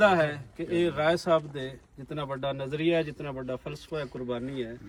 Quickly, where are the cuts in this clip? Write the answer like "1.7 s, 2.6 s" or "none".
none